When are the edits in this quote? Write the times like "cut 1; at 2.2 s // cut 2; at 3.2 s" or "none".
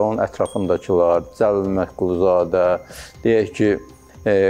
none